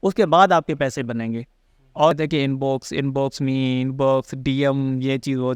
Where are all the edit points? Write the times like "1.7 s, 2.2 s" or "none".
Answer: 2.1 s